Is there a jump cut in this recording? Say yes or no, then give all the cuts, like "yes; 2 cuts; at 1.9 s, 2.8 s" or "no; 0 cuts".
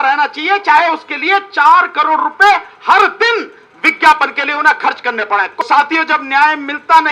yes; 1 cut; at 5.6 s